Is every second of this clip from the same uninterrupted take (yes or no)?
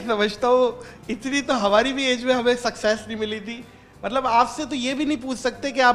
yes